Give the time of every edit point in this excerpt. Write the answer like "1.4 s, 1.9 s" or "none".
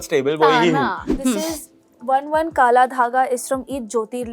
1.0 s

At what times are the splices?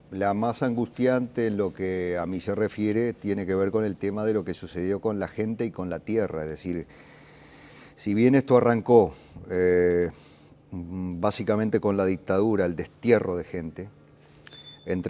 12.2 s

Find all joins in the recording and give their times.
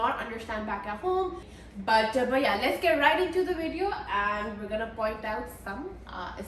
1.5 s

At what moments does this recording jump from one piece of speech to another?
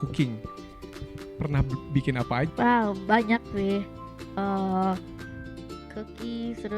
2.5 s

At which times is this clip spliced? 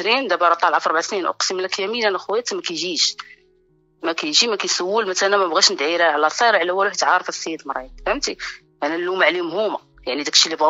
none

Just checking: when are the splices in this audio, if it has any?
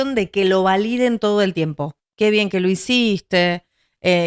none

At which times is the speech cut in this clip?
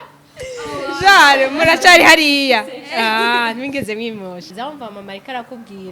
4.5 s

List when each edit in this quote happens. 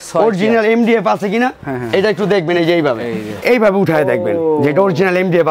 3.4 s

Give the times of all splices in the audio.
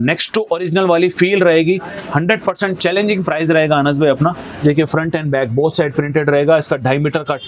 none

